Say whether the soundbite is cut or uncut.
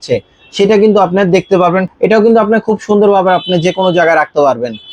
cut